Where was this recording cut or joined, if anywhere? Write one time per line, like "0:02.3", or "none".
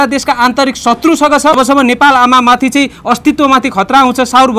0:01.6